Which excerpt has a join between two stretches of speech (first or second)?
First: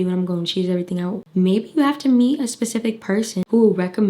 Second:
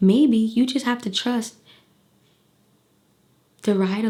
first